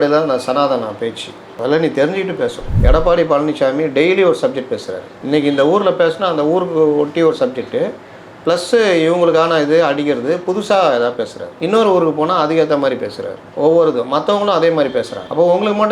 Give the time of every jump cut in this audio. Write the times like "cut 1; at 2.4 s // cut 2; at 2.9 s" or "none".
cut 1; at 2.7 s